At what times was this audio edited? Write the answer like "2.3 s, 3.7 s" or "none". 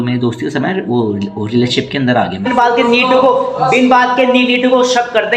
2.5 s